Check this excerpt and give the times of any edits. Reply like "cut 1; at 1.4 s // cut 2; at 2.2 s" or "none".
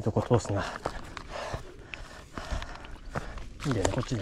none

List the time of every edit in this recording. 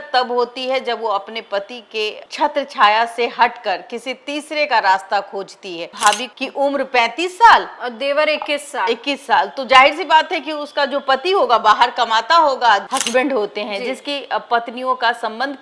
cut 1; at 5.9 s // cut 2; at 12.8 s

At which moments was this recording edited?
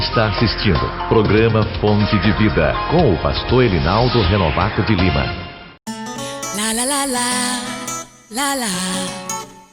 cut 1; at 5.7 s

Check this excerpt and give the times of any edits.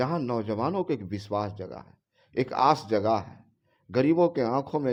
none

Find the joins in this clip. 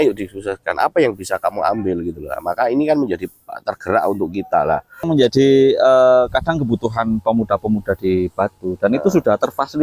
cut 1; at 5.1 s

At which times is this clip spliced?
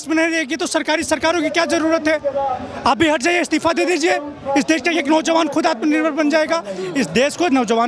none

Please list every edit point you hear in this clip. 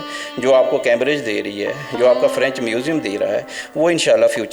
none

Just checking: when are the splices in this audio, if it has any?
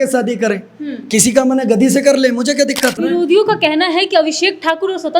cut 1; at 3.0 s

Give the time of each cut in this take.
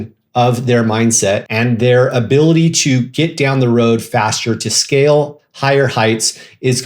cut 1; at 1.5 s

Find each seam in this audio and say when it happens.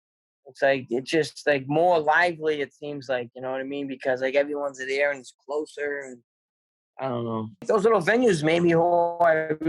cut 1; at 7.6 s

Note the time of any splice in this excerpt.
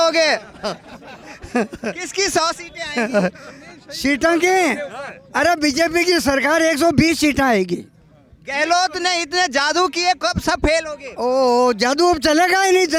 none

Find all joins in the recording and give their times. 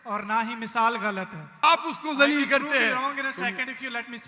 cut 1; at 1.6 s

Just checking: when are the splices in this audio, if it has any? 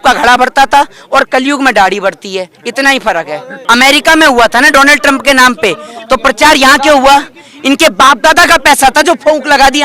cut 1; at 3.6 s

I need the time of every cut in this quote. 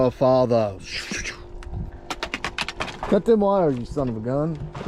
none

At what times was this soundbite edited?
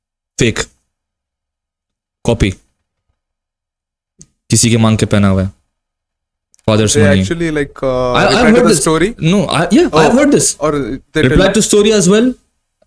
none

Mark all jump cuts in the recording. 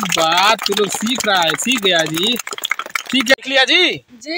cut 1; at 3.3 s

